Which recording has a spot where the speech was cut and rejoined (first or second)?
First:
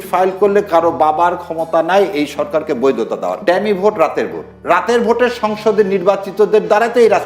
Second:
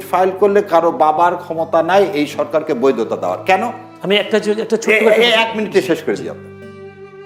first